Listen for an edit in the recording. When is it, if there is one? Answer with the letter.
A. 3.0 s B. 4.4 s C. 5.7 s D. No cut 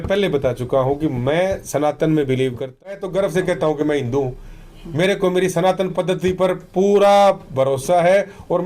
A